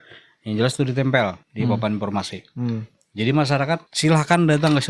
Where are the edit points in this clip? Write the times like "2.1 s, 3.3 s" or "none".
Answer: 1.4 s, 3.9 s